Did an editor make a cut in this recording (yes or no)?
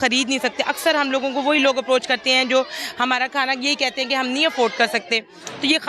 no